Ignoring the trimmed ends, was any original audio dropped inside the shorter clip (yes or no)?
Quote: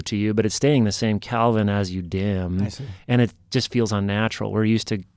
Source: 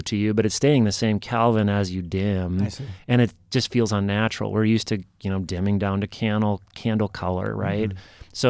no